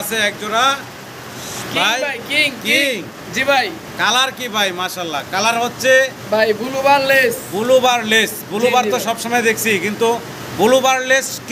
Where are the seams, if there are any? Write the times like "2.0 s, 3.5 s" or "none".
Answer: none